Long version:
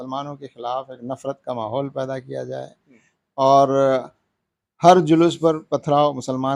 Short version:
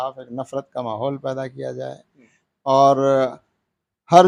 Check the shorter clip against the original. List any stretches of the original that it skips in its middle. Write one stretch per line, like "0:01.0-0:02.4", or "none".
none